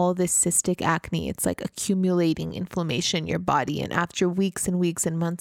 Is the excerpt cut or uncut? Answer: uncut